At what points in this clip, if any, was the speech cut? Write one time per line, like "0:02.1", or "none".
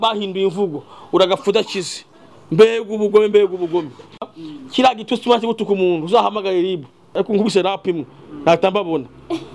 0:07.0